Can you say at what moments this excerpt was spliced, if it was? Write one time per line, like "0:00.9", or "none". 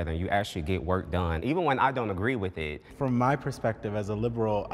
0:01.4
0:02.8